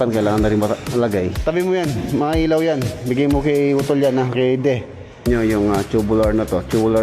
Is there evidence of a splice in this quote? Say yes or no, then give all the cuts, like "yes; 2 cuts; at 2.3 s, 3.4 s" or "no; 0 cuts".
yes; 2 cuts; at 1.4 s, 5.3 s